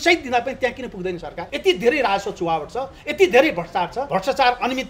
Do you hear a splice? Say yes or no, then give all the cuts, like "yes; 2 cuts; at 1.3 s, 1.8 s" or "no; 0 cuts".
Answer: yes; 2 cuts; at 1.4 s, 4.0 s